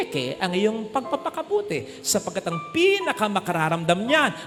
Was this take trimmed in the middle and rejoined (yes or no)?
no